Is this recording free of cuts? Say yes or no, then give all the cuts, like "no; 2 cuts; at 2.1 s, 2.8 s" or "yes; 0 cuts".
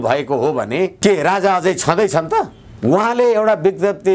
no; 2 cuts; at 0.9 s, 2.6 s